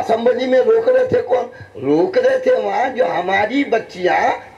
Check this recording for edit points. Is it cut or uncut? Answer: uncut